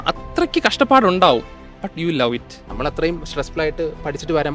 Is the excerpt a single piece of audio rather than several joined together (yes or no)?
no